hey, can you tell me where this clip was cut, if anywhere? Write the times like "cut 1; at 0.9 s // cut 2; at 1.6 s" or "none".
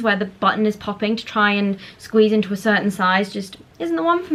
none